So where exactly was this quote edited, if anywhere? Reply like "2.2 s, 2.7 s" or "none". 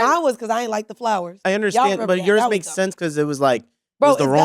1.4 s